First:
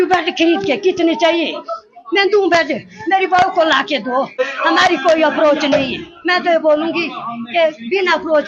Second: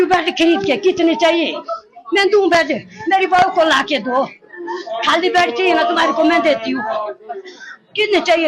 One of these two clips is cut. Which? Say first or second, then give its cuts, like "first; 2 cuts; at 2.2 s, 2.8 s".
first; 1 cut; at 4.4 s